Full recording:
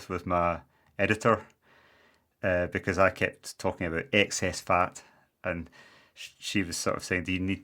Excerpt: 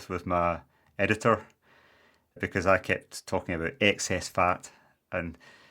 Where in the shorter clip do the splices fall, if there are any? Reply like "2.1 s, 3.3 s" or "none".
2.4 s